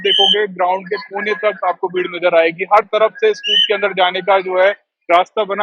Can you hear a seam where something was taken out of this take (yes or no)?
no